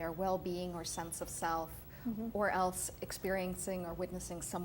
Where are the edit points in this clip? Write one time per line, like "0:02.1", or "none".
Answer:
none